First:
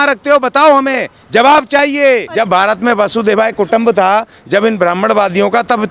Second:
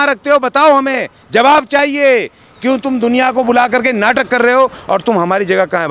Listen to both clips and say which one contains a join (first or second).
first